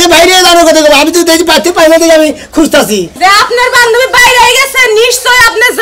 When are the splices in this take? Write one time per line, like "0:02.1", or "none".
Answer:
0:03.1